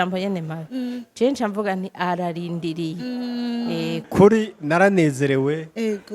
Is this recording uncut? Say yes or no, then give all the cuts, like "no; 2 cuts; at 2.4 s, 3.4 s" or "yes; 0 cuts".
no; 1 cut; at 4.1 s